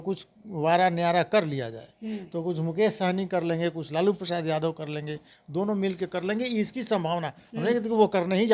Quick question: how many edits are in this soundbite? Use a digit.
0